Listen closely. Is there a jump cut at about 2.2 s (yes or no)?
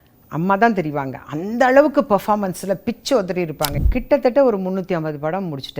no